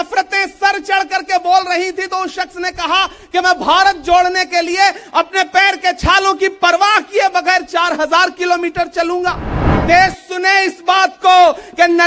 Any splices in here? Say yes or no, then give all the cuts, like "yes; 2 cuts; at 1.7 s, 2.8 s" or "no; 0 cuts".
yes; 1 cut; at 9.7 s